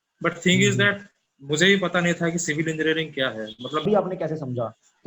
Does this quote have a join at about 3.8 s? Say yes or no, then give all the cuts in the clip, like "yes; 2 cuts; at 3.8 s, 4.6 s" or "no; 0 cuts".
yes; 1 cut; at 3.8 s